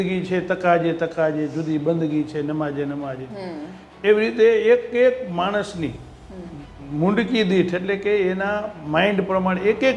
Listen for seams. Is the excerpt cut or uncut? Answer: uncut